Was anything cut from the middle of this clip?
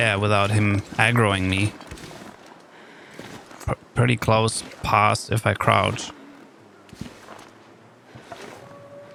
no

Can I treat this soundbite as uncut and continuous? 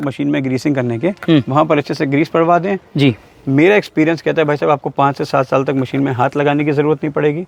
yes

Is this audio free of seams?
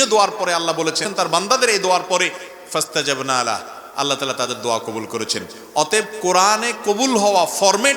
no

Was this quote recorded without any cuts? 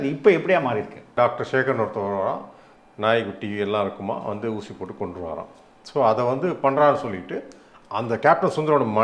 no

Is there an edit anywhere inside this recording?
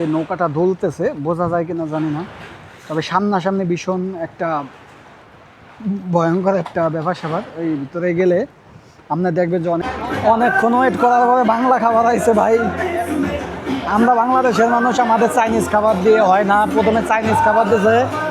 yes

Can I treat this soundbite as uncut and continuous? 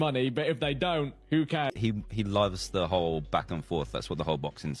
no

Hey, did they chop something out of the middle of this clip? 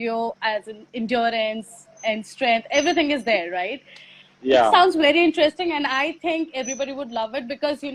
no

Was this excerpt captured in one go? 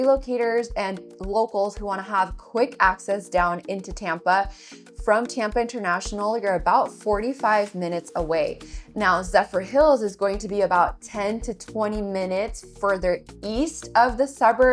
yes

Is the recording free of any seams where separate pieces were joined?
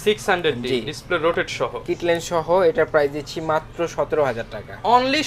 yes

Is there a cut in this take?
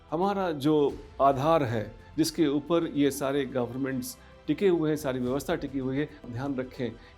yes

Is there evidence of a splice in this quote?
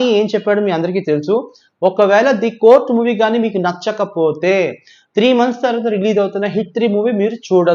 no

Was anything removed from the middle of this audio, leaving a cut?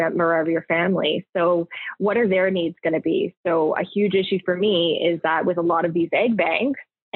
no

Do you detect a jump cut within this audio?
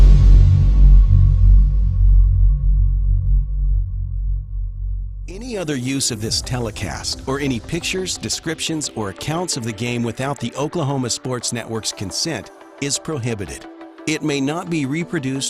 yes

